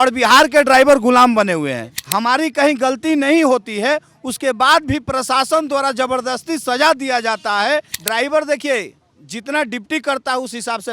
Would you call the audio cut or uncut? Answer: cut